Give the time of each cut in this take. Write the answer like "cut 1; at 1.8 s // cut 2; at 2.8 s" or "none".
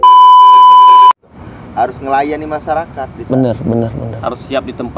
cut 1; at 0.9 s